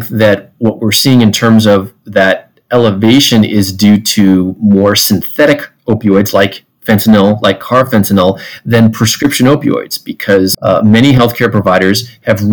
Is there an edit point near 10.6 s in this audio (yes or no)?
yes